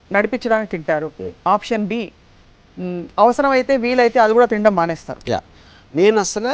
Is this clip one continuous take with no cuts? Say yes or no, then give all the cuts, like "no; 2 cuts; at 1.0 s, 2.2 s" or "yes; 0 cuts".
yes; 0 cuts